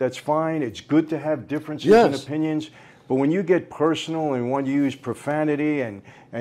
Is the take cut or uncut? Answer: uncut